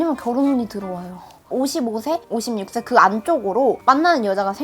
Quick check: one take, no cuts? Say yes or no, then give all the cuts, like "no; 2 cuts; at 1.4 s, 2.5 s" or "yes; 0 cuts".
no; 1 cut; at 1.5 s